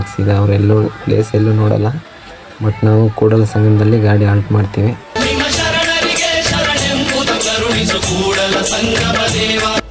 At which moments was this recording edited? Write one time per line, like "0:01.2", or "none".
0:05.2